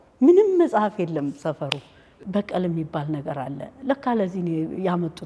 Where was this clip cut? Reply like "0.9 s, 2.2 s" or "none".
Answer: 2.1 s